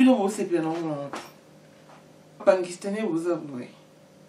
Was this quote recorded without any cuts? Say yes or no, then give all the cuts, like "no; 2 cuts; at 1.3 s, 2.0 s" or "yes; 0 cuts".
no; 1 cut; at 2.4 s